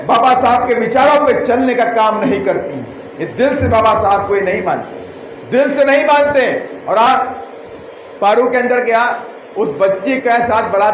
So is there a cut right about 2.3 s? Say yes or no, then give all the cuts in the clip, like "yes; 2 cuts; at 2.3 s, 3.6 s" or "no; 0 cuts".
no; 1 cut; at 7.1 s